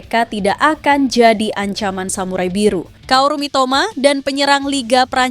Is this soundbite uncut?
no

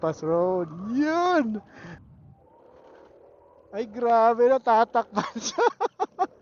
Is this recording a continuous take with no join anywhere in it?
yes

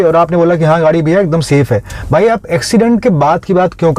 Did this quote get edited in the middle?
no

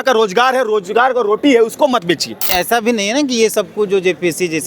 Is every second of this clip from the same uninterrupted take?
no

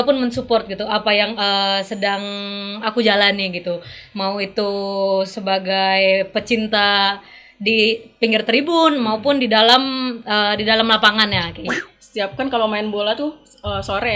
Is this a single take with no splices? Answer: no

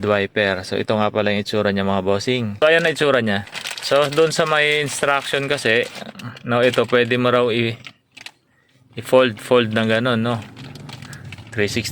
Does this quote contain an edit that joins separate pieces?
yes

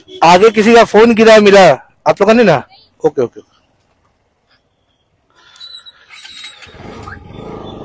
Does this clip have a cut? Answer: no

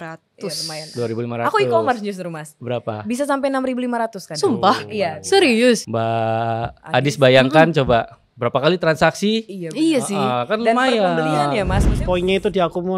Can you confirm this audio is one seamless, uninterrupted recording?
no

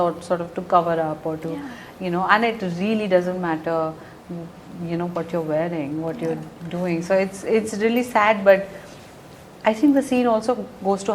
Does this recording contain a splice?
no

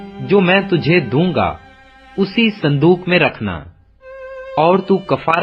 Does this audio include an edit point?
no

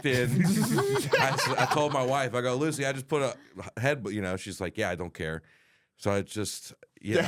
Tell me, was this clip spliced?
no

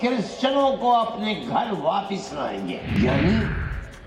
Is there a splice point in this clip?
yes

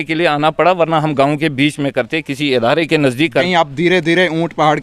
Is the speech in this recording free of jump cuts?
no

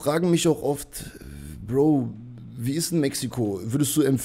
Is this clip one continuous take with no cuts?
yes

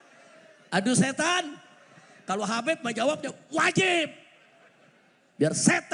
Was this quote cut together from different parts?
no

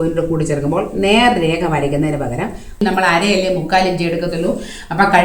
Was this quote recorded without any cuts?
no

